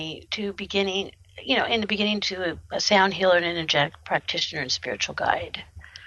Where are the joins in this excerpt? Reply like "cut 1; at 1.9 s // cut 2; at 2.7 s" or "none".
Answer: cut 1; at 4.0 s